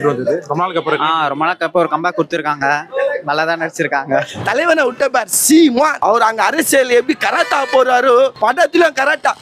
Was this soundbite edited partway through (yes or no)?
yes